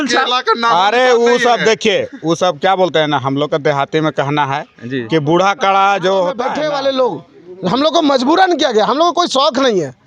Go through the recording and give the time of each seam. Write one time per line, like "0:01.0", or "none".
0:06.5